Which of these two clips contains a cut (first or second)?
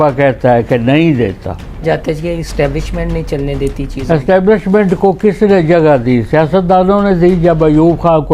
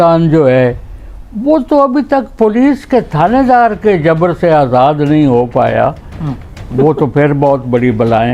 first